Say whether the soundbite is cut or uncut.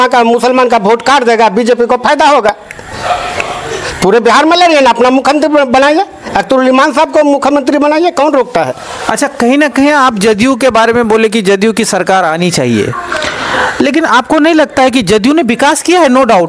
uncut